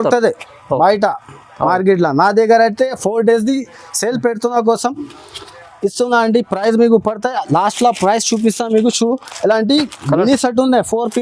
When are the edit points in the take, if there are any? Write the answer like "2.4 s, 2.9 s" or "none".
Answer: none